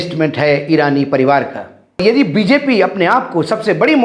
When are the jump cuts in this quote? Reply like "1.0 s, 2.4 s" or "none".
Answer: 2.0 s